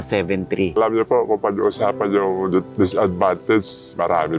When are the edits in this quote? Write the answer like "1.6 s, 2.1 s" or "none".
none

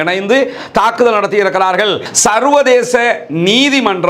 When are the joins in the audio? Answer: 2.1 s

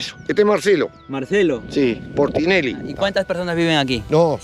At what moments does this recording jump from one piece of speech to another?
2.9 s

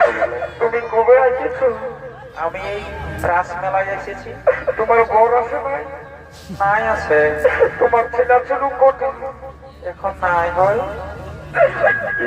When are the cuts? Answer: none

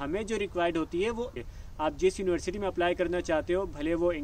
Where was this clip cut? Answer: 1.4 s

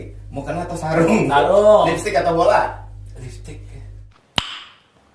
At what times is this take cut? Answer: 4.2 s

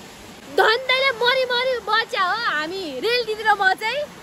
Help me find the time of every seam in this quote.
none

